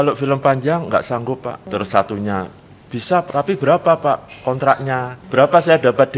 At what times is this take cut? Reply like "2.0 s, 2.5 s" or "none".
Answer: 1.6 s, 3.2 s, 5.2 s